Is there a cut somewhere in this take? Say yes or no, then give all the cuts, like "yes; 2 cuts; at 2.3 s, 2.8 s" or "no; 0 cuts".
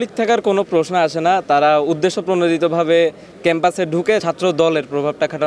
yes; 1 cut; at 4.2 s